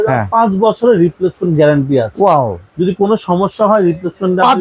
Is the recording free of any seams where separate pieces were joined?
yes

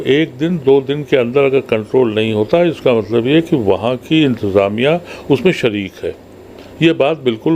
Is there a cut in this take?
no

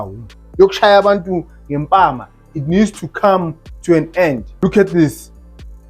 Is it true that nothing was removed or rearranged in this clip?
no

